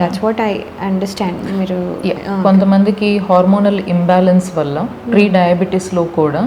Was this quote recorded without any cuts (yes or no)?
no